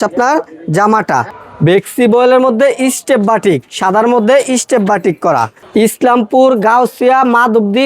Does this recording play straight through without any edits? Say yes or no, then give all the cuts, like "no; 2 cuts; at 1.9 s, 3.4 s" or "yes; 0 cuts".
no; 2 cuts; at 1.4 s, 5.6 s